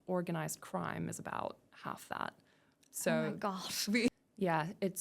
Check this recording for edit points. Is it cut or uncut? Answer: cut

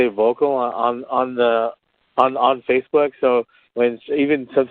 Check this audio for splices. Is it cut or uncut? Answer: cut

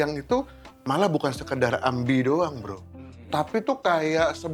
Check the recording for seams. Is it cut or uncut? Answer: uncut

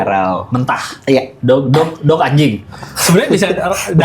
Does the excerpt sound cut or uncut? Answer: cut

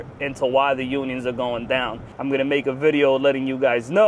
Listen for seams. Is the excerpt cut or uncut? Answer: cut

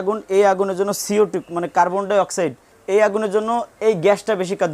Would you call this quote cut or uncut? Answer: cut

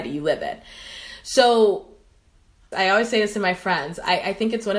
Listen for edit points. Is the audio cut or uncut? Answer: uncut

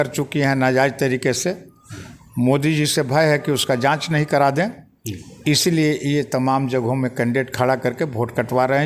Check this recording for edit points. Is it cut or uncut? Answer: uncut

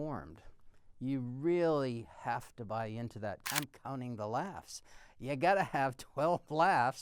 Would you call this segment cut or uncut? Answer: cut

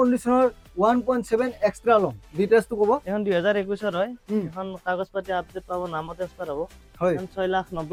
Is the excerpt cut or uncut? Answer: uncut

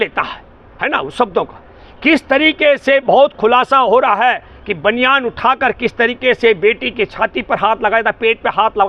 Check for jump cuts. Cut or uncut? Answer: uncut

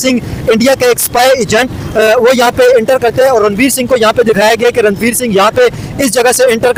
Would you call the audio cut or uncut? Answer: uncut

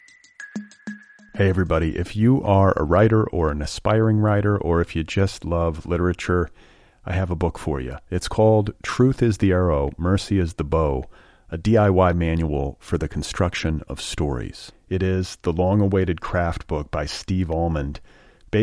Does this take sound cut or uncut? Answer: cut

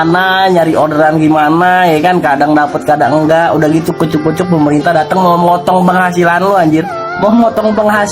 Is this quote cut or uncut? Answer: uncut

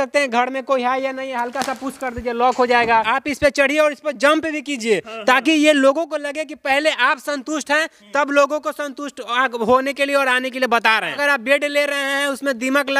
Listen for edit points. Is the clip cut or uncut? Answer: cut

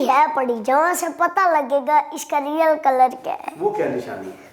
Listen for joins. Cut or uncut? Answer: uncut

